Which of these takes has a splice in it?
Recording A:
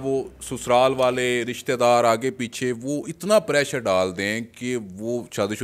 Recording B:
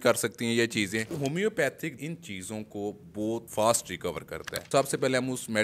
B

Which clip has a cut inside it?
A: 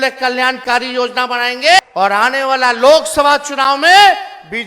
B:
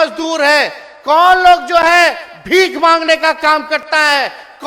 A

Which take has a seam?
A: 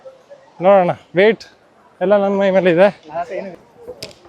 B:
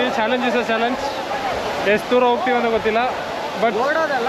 A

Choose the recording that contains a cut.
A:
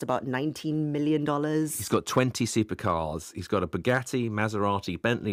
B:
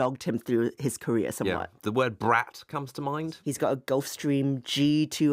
B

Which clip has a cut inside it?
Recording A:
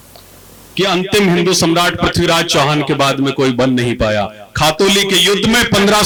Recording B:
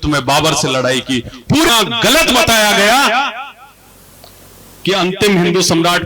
B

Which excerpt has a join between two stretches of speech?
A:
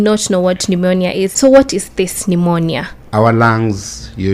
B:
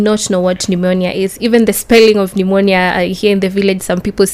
A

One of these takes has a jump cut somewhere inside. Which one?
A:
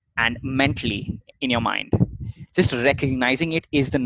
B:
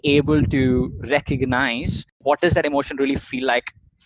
B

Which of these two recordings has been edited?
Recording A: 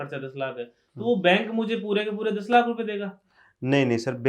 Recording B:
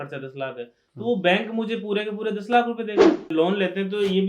B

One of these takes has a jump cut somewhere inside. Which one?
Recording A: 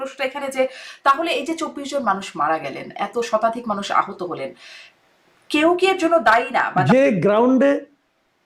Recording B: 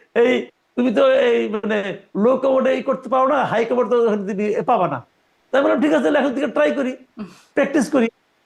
A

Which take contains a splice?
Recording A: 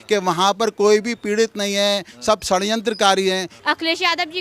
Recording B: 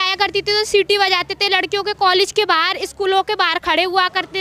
A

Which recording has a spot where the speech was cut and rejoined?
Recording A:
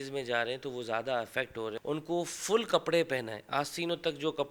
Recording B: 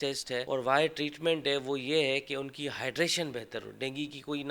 A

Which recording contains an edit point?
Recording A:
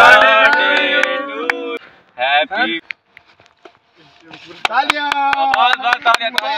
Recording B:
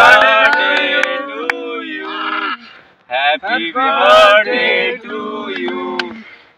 A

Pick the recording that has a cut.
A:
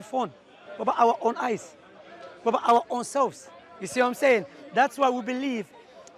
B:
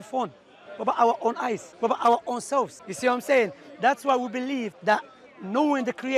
B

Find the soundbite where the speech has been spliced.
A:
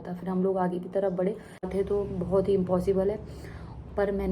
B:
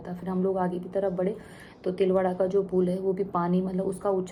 A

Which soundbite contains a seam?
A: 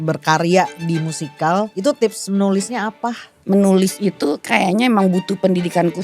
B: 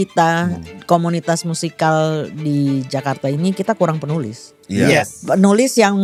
A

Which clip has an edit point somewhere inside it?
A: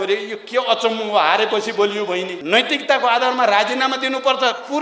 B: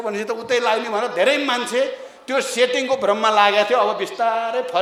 A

